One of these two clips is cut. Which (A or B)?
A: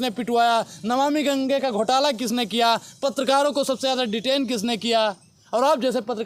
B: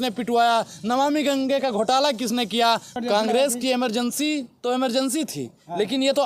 B